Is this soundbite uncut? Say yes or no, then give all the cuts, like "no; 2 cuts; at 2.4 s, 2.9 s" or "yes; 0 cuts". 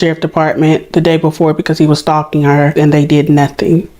no; 1 cut; at 2.7 s